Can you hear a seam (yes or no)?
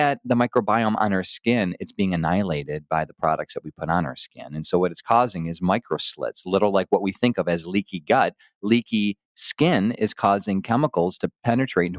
no